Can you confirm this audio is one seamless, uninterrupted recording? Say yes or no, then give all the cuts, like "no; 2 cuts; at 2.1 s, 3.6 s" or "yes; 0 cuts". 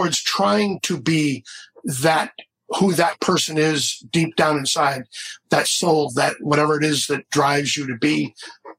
yes; 0 cuts